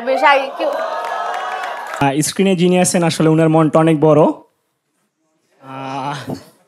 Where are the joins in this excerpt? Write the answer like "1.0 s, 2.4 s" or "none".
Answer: 2.0 s